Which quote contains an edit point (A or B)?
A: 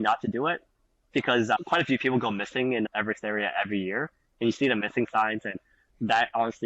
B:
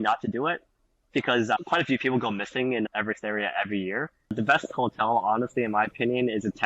B